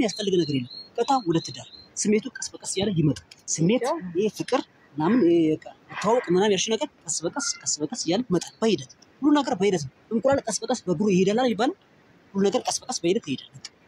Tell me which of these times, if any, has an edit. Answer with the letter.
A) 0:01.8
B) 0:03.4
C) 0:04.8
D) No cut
B